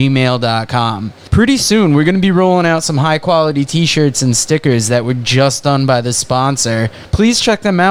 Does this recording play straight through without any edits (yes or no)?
yes